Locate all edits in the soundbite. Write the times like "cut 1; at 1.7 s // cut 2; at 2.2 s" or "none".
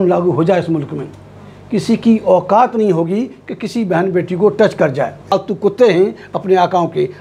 cut 1; at 5.3 s